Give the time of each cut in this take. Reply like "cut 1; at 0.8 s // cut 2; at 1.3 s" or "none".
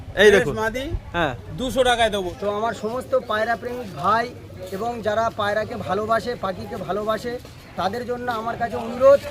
cut 1; at 2.3 s